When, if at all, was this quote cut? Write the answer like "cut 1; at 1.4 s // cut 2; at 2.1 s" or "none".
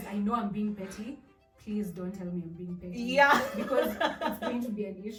none